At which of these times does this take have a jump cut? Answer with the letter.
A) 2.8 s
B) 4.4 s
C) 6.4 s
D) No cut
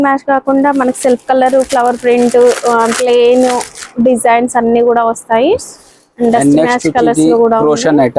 D